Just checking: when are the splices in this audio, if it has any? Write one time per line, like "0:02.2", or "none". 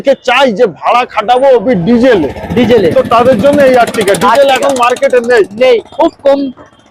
none